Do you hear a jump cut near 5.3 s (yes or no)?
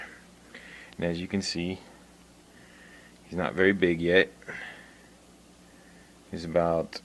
no